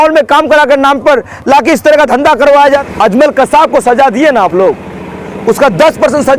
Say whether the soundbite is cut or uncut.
cut